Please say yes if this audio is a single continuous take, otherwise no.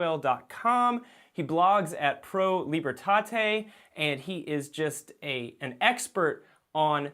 no